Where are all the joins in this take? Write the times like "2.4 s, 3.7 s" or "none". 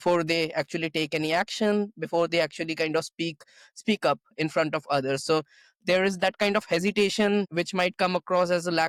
none